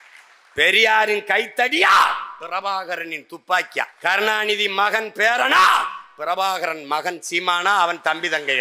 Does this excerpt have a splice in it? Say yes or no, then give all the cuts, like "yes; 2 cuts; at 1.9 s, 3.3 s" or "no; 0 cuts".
yes; 1 cut; at 3.9 s